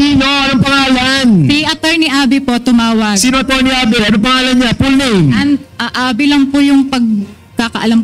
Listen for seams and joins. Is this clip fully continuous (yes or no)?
yes